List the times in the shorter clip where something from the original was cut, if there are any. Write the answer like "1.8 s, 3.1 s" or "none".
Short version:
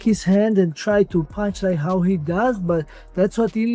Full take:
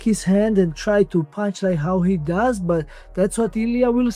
none